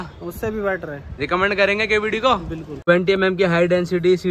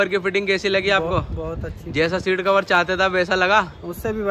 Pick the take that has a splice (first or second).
first